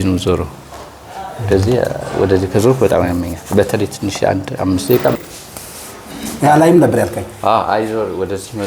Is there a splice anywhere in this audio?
yes; 1 cut; at 5.2 s

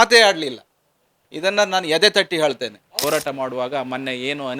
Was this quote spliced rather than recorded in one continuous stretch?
yes; 1 cut; at 2.9 s

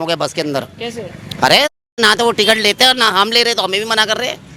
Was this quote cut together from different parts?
no; 0 cuts

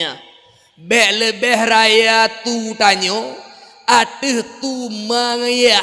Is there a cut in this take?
no; 0 cuts

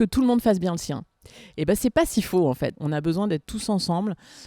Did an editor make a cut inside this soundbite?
yes; 1 cut; at 2.8 s

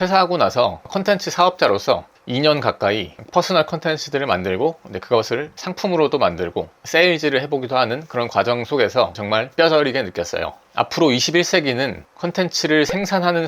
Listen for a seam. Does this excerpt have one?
yes; 2 cuts; at 9.2 s, 10.5 s

